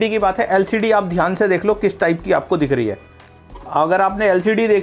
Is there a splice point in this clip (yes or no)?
no